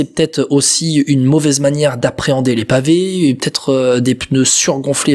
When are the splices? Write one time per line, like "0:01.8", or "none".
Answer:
none